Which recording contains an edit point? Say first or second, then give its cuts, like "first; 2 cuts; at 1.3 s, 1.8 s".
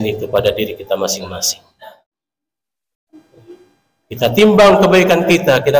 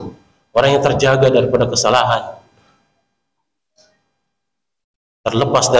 first; 1 cut; at 1.9 s